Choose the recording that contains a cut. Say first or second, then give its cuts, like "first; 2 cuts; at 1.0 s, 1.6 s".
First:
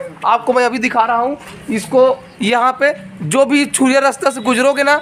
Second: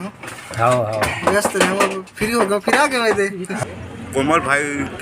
second; 1 cut; at 3.5 s